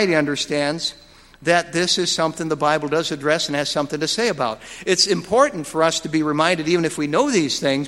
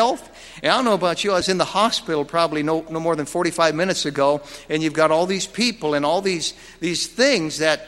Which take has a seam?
second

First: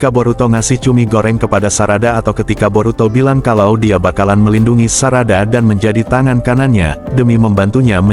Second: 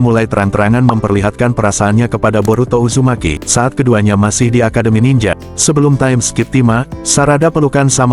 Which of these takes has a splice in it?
second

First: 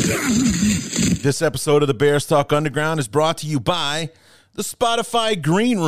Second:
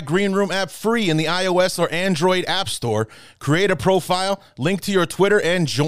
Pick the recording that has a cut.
first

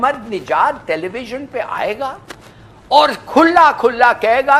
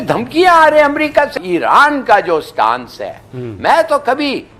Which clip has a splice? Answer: second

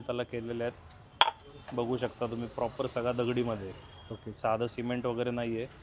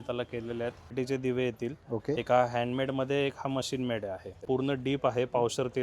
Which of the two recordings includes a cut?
second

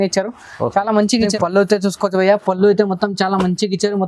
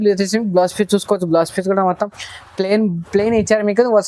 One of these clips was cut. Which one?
first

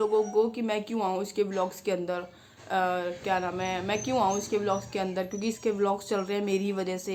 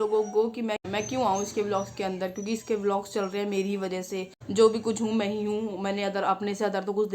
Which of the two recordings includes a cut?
second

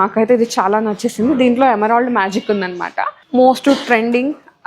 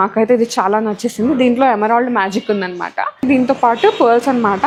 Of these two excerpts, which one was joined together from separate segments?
first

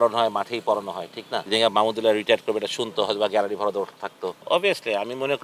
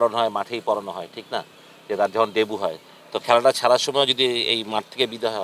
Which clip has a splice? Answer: first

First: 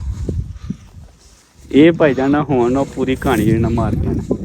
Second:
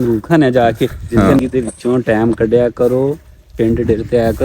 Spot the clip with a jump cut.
second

